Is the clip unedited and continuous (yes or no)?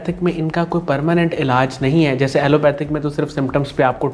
yes